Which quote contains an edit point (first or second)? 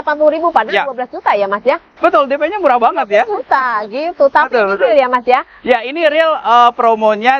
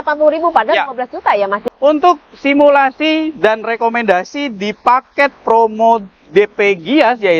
second